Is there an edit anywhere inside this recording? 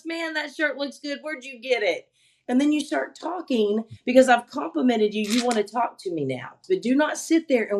yes; 1 cut; at 6.6 s

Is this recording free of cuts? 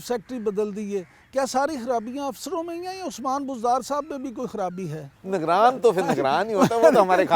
no; 1 cut; at 5.2 s

